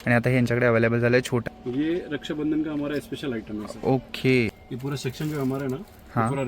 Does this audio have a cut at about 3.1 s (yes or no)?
no